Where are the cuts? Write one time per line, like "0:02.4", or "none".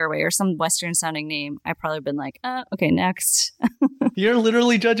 none

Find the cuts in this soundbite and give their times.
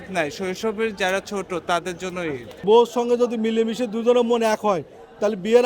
0:02.6

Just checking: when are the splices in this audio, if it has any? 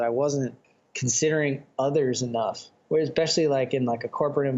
0:02.7

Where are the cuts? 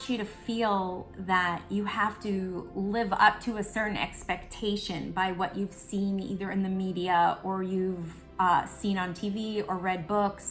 none

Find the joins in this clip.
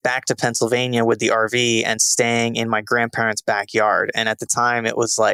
none

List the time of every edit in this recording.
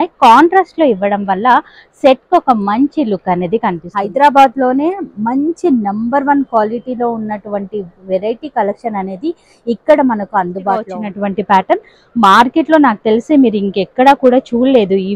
0:03.9
0:10.9

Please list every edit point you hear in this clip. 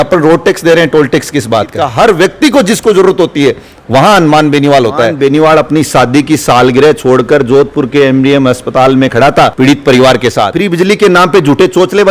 0:01.9
0:05.1
0:10.5

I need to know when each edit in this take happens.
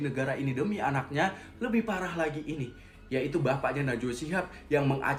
none

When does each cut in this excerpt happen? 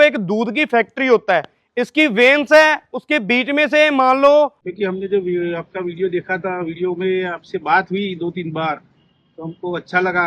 0:04.7

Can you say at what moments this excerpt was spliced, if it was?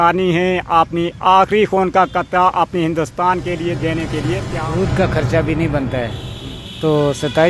0:04.5

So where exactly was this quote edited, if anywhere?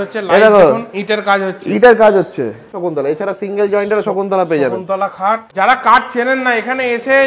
0:02.8
0:05.5

